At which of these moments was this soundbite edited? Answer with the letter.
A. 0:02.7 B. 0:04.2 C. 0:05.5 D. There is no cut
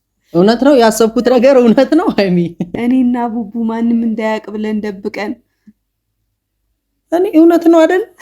A